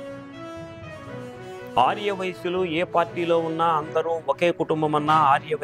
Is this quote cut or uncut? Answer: cut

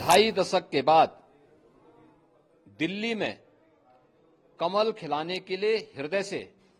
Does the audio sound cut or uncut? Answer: uncut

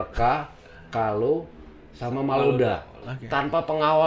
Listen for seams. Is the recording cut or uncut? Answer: cut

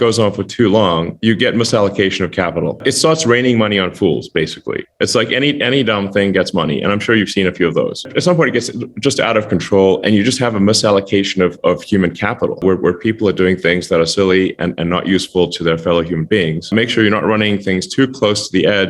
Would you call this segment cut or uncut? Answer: cut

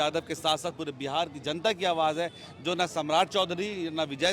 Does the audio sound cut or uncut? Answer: uncut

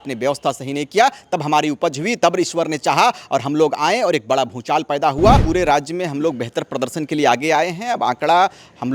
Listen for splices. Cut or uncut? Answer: cut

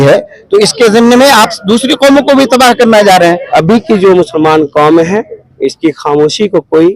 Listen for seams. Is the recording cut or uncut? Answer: cut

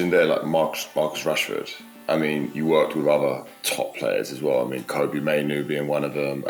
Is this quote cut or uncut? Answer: uncut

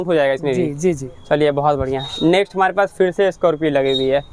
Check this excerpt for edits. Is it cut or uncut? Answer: uncut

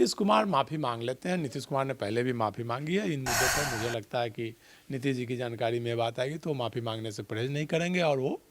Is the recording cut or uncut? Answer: uncut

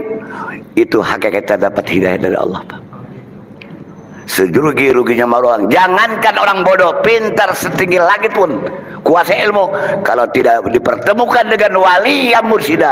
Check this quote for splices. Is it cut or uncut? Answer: uncut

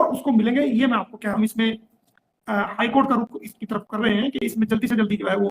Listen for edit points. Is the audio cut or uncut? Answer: cut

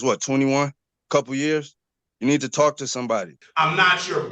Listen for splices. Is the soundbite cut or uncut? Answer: cut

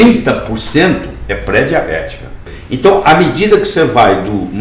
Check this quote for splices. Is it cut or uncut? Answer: cut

